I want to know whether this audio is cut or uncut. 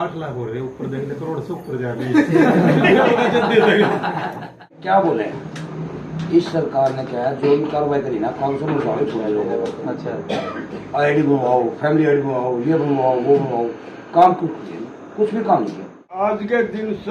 cut